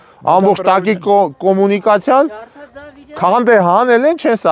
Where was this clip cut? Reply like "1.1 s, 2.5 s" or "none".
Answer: none